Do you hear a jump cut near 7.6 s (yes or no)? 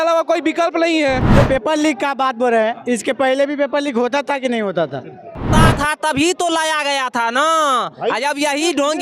no